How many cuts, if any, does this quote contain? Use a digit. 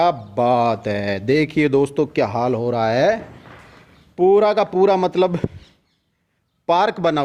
0